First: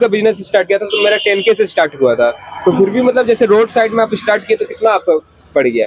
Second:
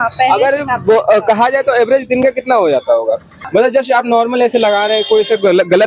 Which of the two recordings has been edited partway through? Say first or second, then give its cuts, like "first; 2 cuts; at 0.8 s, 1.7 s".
second; 1 cut; at 3.4 s